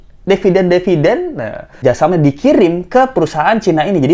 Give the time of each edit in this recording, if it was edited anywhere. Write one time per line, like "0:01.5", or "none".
0:01.8